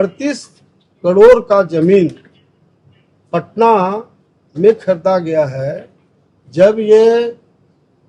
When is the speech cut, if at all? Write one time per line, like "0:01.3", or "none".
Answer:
none